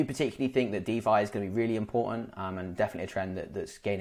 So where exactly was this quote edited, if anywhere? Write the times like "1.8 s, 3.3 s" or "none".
none

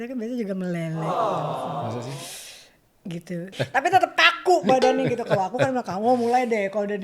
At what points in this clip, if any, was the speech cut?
3.5 s

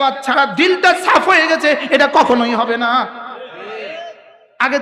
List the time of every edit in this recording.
none

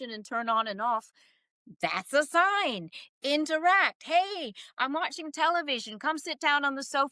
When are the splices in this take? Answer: none

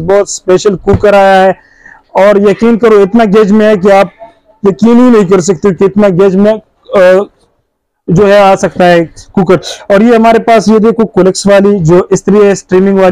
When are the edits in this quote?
none

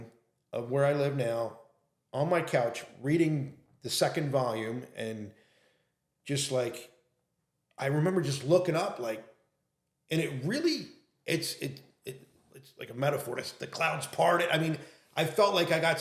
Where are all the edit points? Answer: none

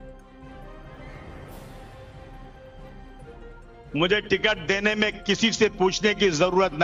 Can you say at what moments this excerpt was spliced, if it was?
none

